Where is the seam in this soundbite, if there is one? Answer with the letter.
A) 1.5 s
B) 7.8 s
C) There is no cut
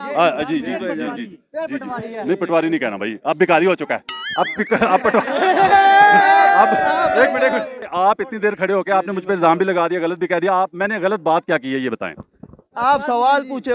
B